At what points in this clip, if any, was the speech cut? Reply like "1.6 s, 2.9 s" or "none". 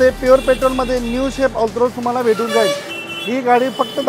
none